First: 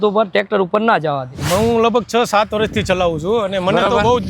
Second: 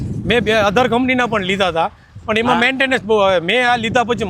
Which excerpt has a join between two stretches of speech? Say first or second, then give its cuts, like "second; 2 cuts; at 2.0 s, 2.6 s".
first; 1 cut; at 1.3 s